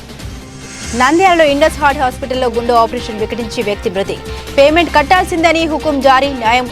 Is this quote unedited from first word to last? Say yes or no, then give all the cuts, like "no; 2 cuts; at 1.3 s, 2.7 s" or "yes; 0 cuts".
no; 1 cut; at 0.9 s